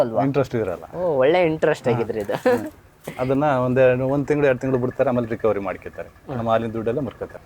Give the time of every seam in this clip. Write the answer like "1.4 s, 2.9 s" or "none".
none